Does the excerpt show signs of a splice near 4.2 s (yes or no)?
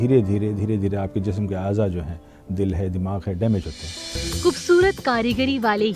yes